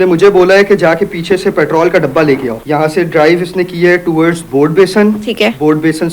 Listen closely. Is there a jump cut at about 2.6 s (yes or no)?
yes